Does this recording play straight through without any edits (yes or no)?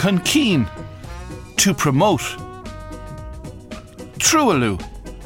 yes